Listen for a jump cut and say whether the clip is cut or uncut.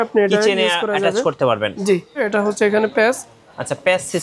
cut